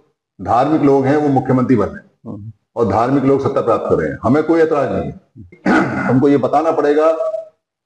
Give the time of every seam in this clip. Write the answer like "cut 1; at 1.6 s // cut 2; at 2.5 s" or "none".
cut 1; at 5.5 s